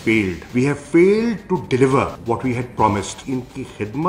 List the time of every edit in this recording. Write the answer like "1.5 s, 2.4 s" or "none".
3.2 s